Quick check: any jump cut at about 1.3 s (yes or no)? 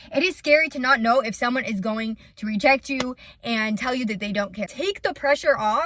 no